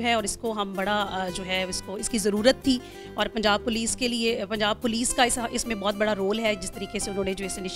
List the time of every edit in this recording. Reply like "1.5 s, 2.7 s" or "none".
none

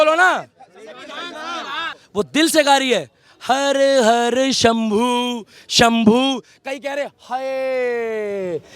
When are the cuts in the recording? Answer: 2.0 s

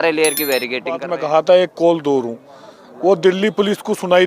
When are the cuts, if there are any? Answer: 1.1 s

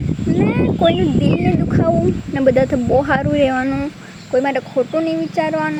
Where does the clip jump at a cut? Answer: none

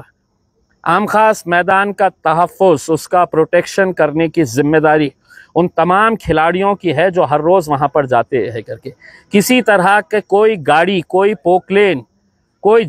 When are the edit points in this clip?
none

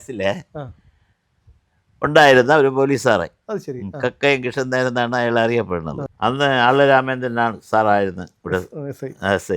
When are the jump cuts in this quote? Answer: 6.0 s

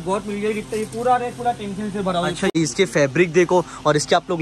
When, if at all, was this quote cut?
2.5 s

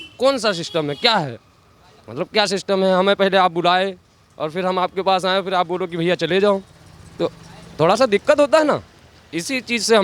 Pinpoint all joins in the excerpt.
none

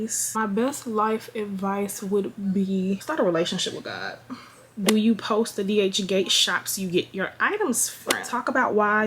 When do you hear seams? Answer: 4.7 s, 8.3 s

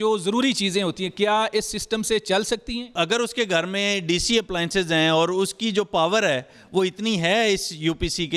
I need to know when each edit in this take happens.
2.9 s

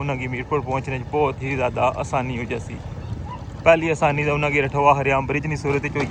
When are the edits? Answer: none

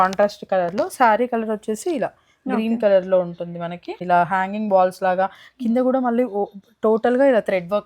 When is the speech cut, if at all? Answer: 3.9 s

